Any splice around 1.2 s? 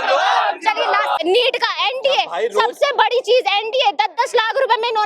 yes; 1 cut; at 1.2 s

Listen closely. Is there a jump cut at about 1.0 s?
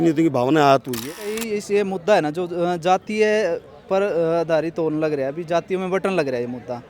yes; 1 cut; at 1.0 s

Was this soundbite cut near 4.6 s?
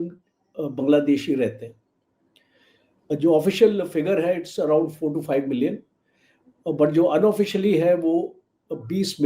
no; 0 cuts

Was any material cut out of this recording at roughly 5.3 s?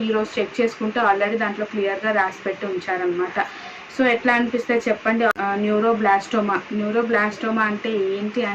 yes; 1 cut; at 5.3 s

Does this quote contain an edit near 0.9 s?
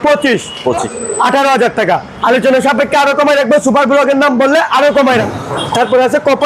yes; 2 cuts; at 0.9 s, 5.1 s

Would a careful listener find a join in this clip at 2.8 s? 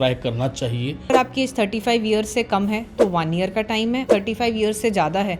no; 2 cuts; at 1.1 s, 4.0 s

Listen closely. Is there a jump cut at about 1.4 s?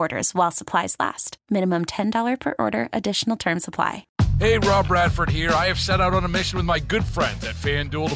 no; 1 cut; at 4.0 s

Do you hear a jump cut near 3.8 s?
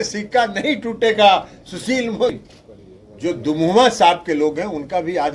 no; 1 cut; at 2.4 s

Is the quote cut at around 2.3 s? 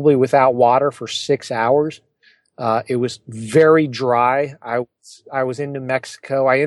no; 0 cuts

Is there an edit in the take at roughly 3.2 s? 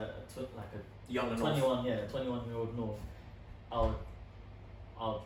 no; 0 cuts

